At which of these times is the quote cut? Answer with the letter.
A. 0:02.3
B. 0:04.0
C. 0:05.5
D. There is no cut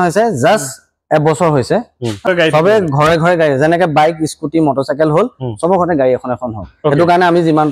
A